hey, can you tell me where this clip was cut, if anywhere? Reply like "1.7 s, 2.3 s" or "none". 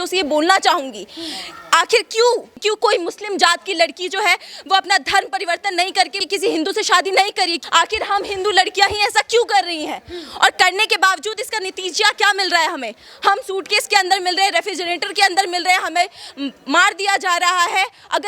2.5 s, 6.2 s, 7.6 s